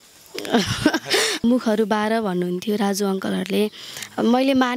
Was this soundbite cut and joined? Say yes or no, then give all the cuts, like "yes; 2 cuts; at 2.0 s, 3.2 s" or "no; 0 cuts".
yes; 1 cut; at 1.4 s